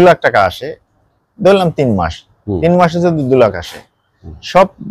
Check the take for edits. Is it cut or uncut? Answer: uncut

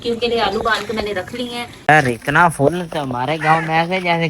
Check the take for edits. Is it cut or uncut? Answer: cut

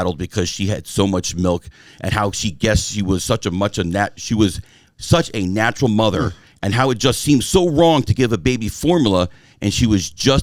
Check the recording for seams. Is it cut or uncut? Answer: uncut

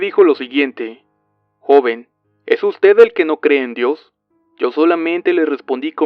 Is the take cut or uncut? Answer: cut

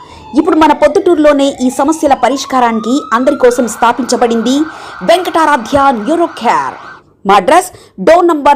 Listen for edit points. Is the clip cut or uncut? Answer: cut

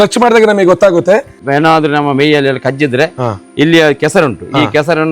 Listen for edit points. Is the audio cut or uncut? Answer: cut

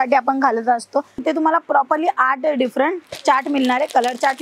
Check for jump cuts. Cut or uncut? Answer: cut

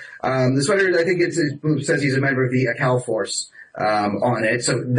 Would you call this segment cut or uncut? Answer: uncut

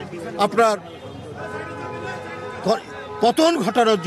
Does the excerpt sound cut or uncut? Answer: uncut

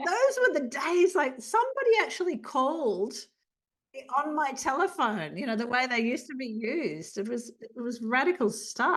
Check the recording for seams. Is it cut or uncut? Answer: uncut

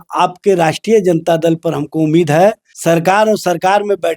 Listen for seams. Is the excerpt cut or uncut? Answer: cut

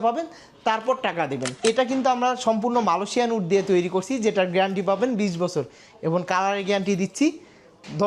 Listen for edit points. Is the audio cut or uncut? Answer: cut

